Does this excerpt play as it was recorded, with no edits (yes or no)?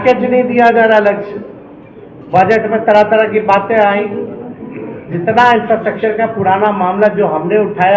yes